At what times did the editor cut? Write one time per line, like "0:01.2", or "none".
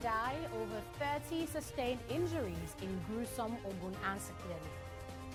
none